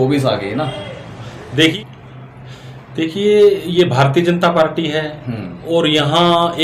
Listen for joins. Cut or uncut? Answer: cut